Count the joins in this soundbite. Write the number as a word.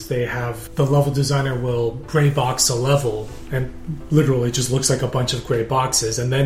one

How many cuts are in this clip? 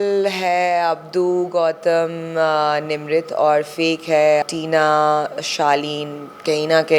one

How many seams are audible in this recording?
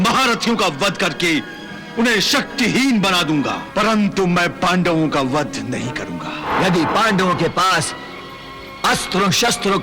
two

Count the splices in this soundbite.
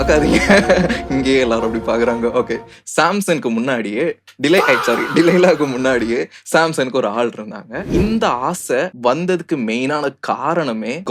one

